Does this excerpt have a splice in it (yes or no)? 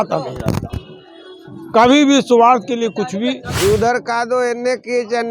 yes